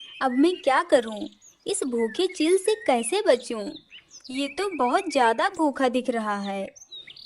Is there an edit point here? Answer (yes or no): no